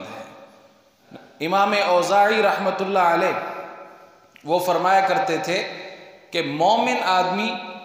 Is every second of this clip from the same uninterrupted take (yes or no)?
no